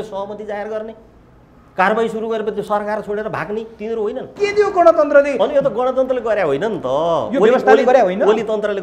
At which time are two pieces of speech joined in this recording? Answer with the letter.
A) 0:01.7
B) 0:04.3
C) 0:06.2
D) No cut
B